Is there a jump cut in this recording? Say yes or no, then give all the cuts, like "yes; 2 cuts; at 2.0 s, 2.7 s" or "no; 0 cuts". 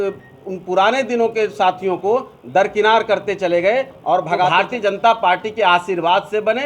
yes; 1 cut; at 4.5 s